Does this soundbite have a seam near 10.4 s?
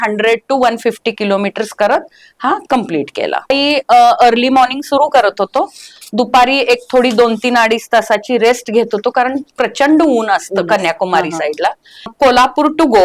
no; 2 cuts; at 3.5 s, 12.1 s

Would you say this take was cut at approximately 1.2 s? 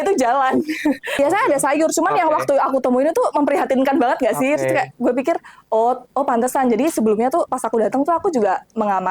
yes; 1 cut; at 1.2 s

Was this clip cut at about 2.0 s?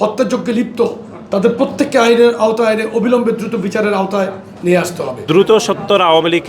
no; 1 cut; at 5.2 s

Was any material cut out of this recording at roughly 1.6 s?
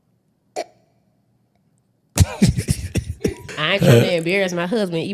no; 1 cut; at 3.4 s

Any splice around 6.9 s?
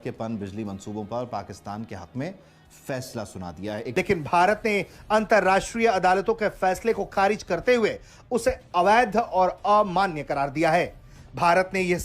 no; 1 cut; at 3.8 s

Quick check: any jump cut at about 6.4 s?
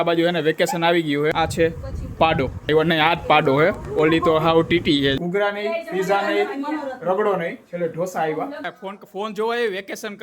no; 4 cuts; at 1.3 s, 2.7 s, 5.2 s, 8.7 s

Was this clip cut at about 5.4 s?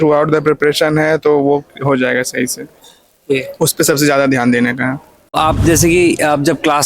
yes; 1 cut; at 5.4 s

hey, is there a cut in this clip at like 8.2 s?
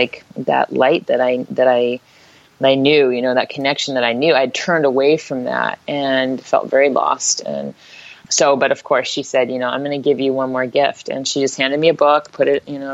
yes; 1 cut; at 8.2 s

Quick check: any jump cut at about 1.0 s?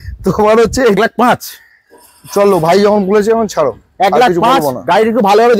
yes; 1 cut; at 1.0 s

